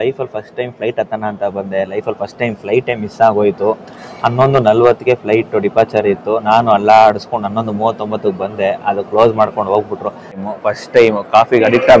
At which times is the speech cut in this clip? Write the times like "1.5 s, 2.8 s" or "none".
10.4 s

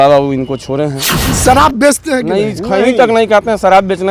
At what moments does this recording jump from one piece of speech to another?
1.4 s

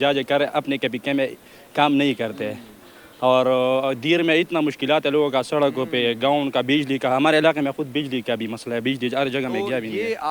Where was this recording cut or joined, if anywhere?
none

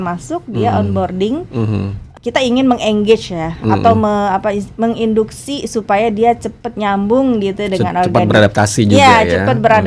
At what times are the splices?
2.0 s

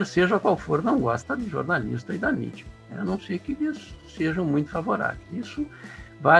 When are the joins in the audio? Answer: none

